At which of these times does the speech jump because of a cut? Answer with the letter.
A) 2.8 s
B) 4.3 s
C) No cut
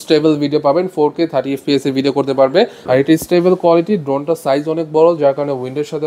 A